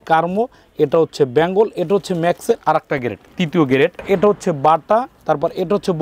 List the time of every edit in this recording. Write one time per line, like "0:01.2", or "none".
0:04.0